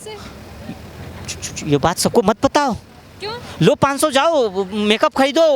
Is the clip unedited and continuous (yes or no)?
yes